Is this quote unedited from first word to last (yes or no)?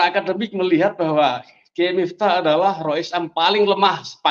yes